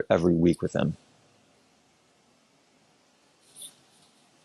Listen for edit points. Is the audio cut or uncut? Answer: uncut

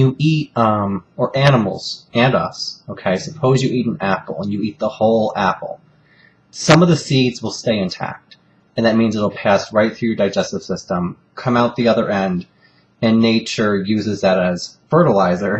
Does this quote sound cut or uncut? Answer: cut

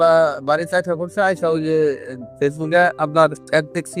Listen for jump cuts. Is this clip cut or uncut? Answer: uncut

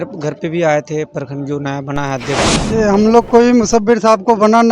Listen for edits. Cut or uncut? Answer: cut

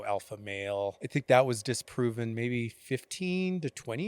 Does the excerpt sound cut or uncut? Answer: cut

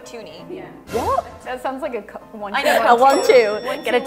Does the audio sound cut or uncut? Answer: cut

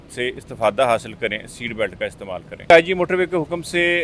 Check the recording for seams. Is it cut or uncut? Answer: cut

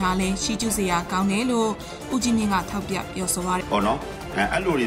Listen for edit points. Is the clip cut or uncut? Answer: cut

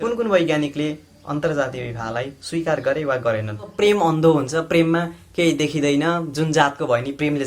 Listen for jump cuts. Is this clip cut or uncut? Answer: cut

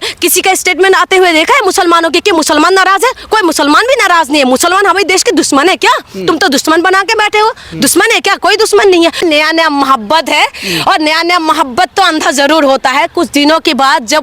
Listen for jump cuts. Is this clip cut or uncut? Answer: cut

